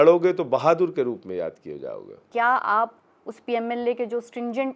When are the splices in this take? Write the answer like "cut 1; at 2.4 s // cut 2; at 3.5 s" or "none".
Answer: cut 1; at 2.3 s